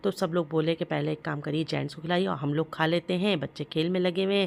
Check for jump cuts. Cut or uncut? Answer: uncut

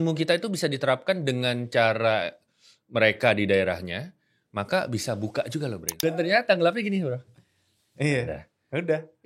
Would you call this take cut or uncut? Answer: cut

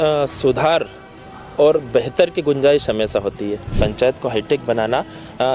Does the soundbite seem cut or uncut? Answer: cut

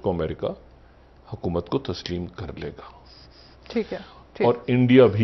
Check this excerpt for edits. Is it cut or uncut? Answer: uncut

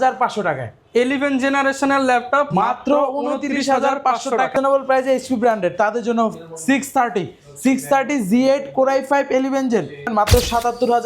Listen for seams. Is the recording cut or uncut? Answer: cut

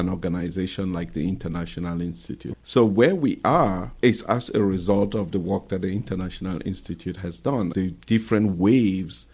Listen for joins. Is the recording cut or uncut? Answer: cut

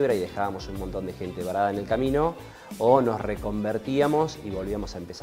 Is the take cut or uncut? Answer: uncut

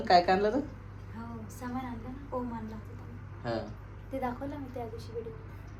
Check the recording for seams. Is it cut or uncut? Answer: uncut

